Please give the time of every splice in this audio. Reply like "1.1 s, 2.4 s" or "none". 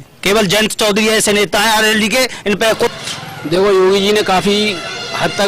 2.9 s

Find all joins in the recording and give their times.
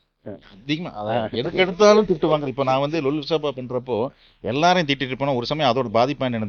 none

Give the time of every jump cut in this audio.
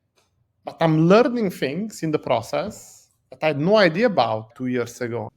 4.5 s

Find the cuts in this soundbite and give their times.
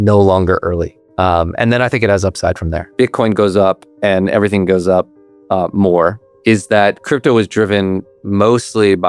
1.0 s, 2.8 s, 6.3 s

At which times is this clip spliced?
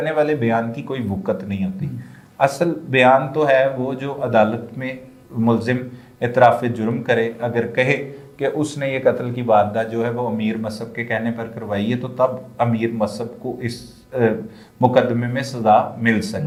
none

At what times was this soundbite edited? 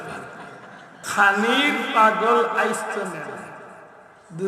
1.1 s

